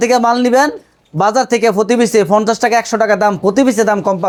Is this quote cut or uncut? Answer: uncut